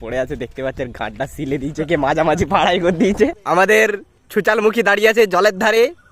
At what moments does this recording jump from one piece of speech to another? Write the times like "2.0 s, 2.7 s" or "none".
3.4 s